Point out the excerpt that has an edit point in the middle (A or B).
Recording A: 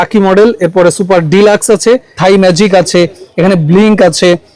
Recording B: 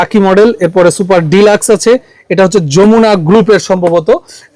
A